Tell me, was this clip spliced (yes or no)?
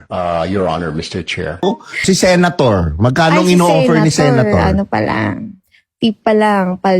yes